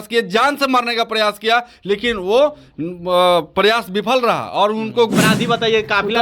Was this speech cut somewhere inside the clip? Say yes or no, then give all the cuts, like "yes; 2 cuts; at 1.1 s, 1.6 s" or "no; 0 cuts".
yes; 1 cut; at 5.1 s